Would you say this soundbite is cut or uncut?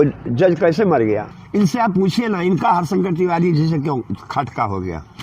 cut